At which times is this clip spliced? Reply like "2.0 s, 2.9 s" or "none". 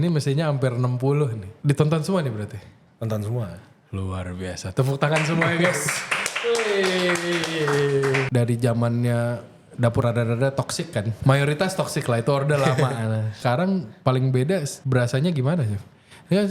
1.5 s, 8.3 s, 10.0 s, 11.1 s, 13.4 s, 14.8 s